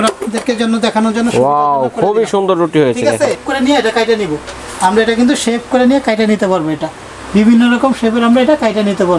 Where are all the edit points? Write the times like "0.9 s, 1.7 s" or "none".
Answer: 3.4 s